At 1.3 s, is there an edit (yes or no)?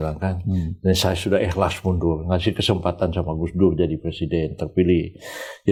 no